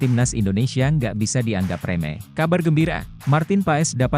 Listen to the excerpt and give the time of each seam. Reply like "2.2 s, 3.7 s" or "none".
2.3 s, 3.1 s